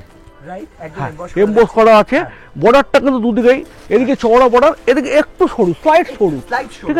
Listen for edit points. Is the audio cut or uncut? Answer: uncut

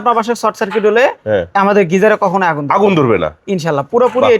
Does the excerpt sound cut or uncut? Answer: uncut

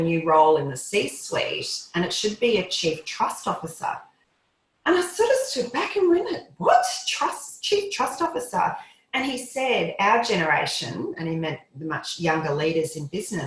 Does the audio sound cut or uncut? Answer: uncut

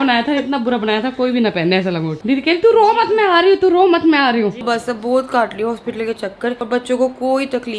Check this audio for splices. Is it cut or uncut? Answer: cut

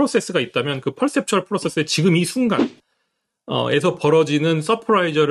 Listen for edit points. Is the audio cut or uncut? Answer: uncut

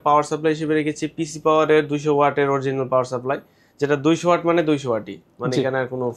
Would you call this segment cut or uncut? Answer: uncut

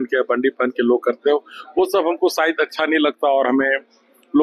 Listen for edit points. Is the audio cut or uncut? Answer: uncut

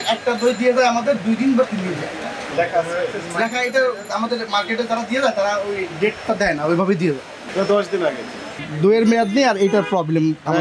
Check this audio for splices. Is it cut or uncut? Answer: cut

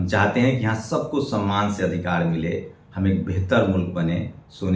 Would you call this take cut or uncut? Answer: uncut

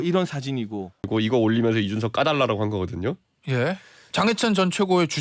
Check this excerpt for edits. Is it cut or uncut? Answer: uncut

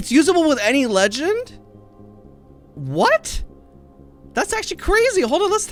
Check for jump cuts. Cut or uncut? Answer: uncut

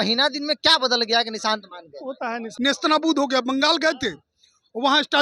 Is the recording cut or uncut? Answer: cut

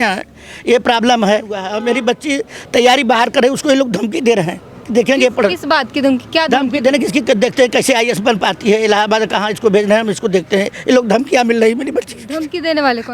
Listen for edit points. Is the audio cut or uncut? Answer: cut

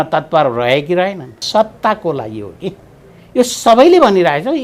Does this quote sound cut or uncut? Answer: cut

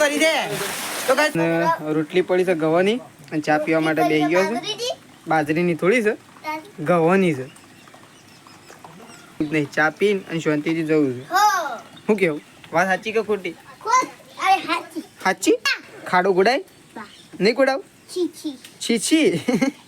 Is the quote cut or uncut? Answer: cut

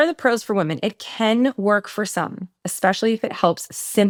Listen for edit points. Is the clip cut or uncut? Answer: uncut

